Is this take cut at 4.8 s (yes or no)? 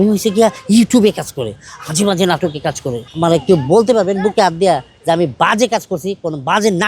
no